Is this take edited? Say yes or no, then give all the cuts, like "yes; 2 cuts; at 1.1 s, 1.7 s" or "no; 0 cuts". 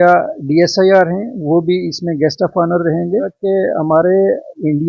yes; 1 cut; at 3.3 s